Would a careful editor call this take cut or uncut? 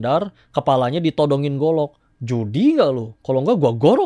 uncut